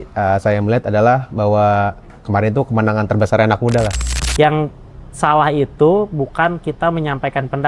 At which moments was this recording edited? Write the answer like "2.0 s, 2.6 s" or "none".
4.1 s

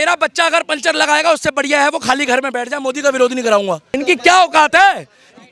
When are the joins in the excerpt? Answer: 3.9 s

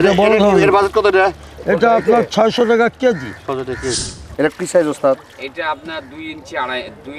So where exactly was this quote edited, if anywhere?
4.1 s

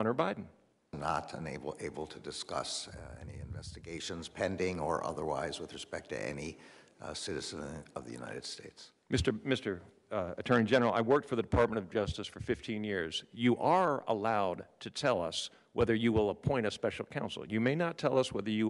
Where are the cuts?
1.0 s

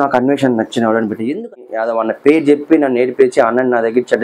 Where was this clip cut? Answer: 1.5 s

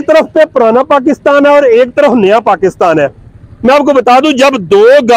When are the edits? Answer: none

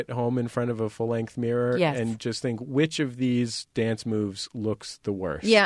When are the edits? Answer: none

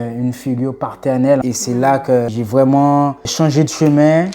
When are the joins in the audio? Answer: 1.4 s, 2.3 s

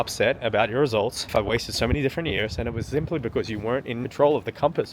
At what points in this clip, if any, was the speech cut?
1.3 s, 4.1 s

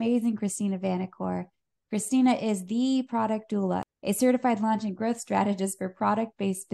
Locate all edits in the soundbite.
3.9 s

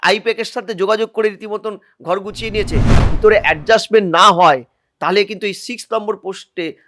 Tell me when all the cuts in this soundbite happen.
3.0 s

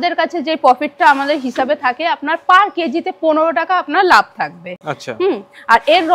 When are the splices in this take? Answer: none

